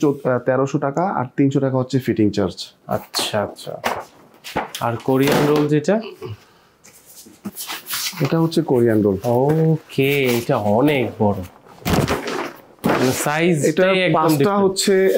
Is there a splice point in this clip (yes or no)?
no